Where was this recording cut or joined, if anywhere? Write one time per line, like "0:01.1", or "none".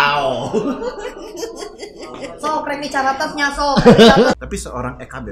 0:04.4